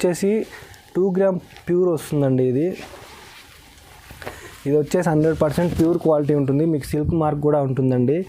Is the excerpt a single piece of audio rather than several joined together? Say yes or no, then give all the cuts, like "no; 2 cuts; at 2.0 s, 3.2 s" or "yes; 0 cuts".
yes; 0 cuts